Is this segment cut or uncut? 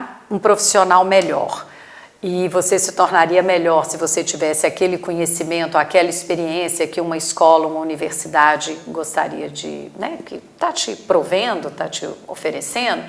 uncut